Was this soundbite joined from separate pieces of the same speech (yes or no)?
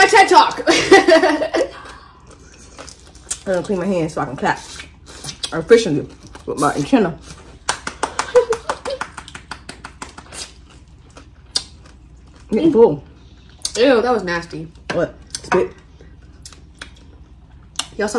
no